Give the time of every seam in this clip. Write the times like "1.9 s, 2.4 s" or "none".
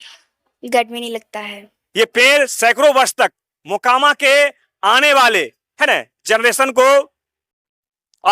1.8 s